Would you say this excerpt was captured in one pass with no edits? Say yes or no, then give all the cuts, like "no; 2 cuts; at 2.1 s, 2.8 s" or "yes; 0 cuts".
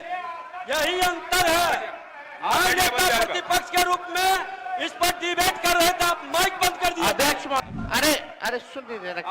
no; 1 cut; at 7.6 s